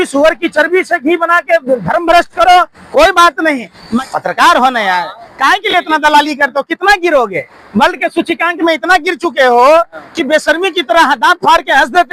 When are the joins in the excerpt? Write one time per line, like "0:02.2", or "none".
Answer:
0:04.0